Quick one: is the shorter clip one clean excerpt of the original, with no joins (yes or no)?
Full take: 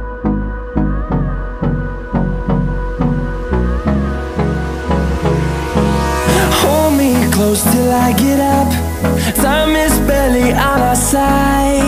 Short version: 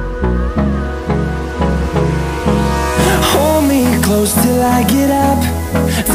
yes